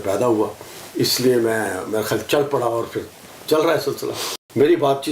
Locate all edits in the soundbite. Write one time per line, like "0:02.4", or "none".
0:04.2